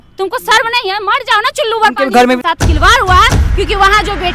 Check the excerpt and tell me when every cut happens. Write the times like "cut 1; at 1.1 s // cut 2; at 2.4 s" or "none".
cut 1; at 2.4 s